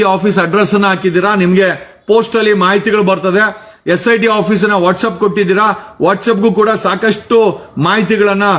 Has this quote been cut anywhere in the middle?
no; 0 cuts

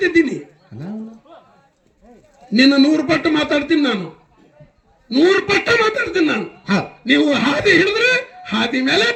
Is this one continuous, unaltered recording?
yes; 0 cuts

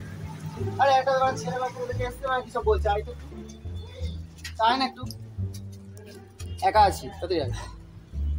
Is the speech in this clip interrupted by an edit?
no; 0 cuts

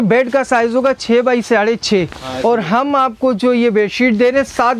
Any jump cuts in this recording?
no; 0 cuts

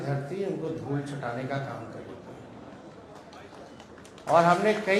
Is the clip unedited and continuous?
yes; 0 cuts

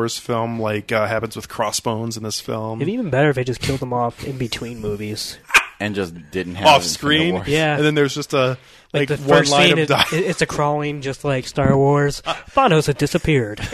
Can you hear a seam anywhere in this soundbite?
no; 0 cuts

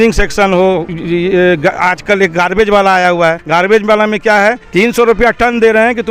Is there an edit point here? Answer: yes; 3 cuts; at 0.9 s, 3.4 s, 4.6 s

